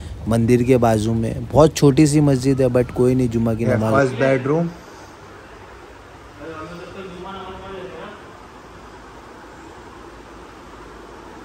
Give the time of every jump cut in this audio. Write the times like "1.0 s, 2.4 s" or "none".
3.8 s